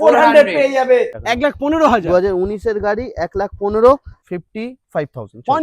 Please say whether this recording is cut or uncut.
cut